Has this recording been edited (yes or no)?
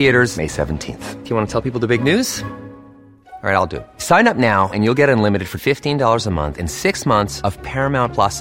no